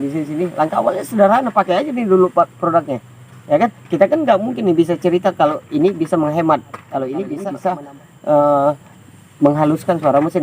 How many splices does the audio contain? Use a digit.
1